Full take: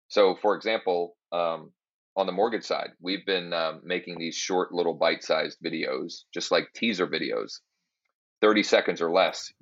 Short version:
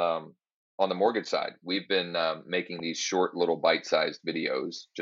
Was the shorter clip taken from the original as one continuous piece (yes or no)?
yes